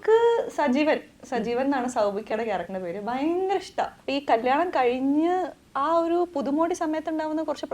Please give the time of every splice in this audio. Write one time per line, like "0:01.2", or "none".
0:04.0